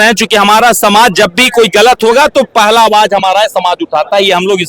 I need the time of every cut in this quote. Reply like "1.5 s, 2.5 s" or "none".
none